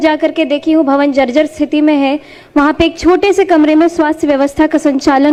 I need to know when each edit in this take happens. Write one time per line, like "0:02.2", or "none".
none